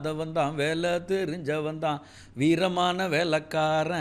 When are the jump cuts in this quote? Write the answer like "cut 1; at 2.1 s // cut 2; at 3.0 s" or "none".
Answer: none